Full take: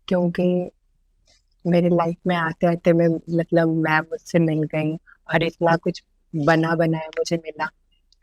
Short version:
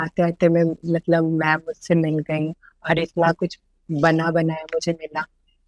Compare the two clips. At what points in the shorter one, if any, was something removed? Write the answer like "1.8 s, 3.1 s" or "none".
none